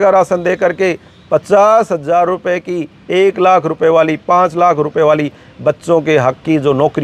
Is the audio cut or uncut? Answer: uncut